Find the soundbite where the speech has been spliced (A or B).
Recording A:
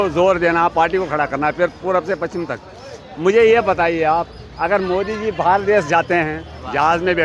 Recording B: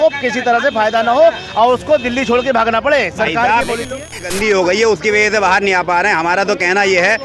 B